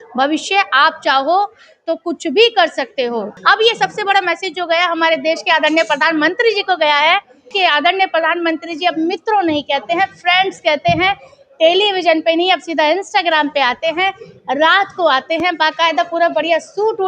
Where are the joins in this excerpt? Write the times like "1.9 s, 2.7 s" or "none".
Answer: 3.3 s, 7.5 s